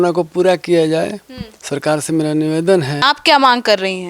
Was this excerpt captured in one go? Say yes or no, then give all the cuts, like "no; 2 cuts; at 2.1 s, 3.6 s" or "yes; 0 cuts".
no; 1 cut; at 3.0 s